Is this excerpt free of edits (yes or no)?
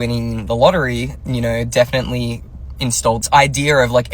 yes